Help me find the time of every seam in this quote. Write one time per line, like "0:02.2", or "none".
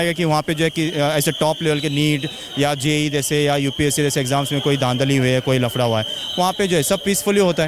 none

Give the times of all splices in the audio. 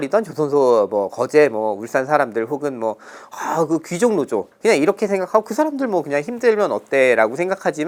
none

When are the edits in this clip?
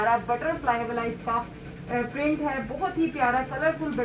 none

